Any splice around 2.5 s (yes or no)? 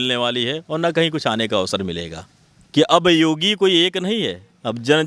yes